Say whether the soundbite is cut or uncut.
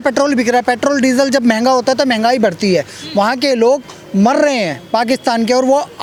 uncut